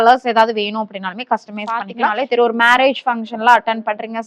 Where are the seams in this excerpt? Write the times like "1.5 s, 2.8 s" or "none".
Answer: 1.8 s